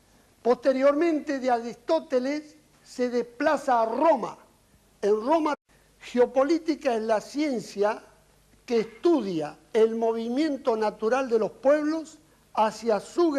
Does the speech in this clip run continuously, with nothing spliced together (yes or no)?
yes